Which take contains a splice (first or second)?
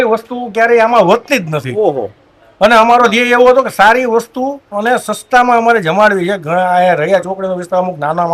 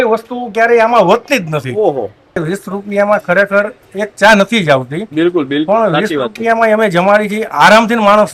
second